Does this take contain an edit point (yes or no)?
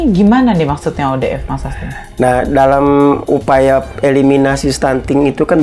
no